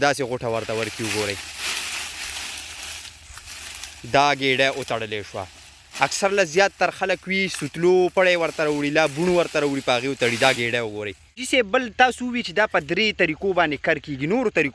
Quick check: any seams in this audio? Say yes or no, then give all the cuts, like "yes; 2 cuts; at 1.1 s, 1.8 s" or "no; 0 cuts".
yes; 1 cut; at 11.4 s